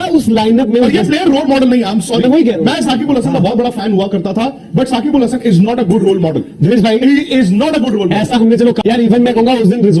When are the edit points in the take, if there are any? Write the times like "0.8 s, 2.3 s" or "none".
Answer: 8.8 s